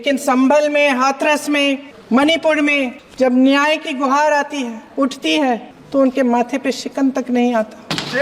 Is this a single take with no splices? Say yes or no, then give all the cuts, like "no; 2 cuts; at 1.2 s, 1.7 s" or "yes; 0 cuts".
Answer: no; 4 cuts; at 1.9 s, 3.0 s, 4.8 s, 5.7 s